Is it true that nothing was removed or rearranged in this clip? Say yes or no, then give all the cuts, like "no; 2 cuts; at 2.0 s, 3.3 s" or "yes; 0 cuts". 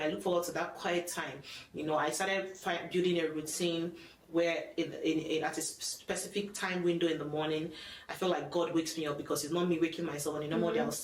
yes; 0 cuts